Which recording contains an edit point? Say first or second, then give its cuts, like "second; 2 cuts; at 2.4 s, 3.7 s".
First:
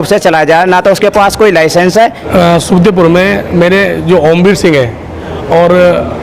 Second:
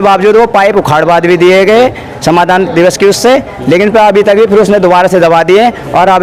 first; 1 cut; at 2.2 s